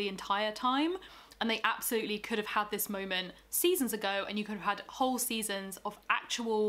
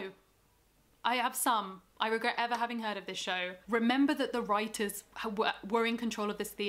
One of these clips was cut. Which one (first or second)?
second